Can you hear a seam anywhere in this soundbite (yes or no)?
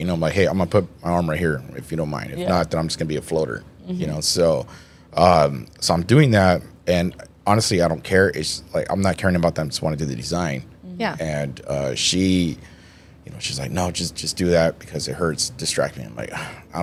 no